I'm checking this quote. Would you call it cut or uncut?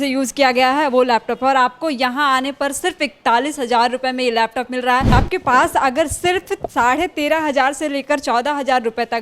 cut